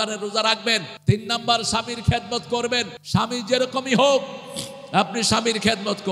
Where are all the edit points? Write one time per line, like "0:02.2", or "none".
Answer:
0:00.9
0:03.0